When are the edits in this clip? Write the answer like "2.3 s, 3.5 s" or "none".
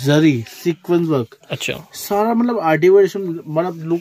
none